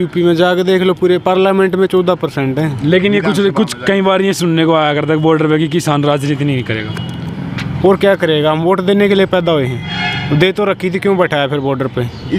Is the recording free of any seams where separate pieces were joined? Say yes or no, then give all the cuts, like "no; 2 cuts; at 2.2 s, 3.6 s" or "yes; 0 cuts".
yes; 0 cuts